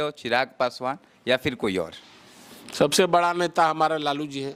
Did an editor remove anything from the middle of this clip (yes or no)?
no